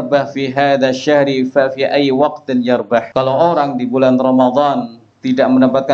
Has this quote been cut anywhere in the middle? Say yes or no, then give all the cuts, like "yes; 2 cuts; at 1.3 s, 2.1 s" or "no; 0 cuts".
yes; 1 cut; at 3.1 s